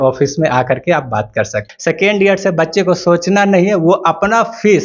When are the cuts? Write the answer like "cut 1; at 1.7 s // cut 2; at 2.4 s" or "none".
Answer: cut 1; at 1.7 s